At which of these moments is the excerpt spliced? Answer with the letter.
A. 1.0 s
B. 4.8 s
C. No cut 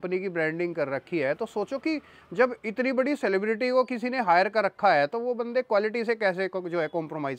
C